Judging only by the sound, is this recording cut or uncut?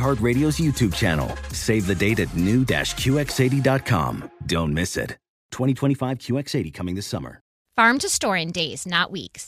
cut